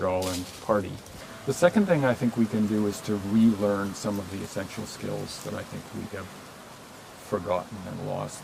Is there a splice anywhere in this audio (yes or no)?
yes